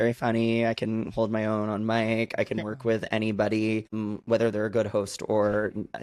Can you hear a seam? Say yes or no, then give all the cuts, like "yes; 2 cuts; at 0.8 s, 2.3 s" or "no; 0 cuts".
yes; 1 cut; at 4.0 s